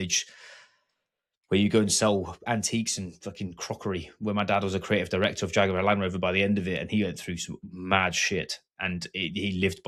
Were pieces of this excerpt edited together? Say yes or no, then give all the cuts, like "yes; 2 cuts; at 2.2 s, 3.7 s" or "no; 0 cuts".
no; 0 cuts